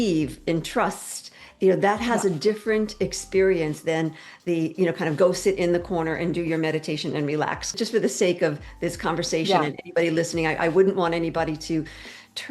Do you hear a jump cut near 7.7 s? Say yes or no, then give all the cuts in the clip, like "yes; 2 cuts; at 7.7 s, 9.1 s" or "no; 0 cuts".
yes; 1 cut; at 7.7 s